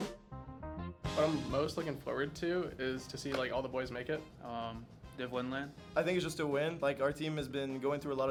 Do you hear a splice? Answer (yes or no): no